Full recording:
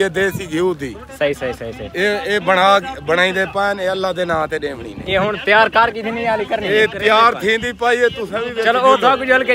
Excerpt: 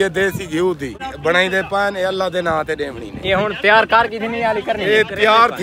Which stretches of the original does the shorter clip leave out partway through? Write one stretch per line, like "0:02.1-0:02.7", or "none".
0:01.1-0:02.9